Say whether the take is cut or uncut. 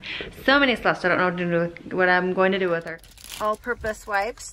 cut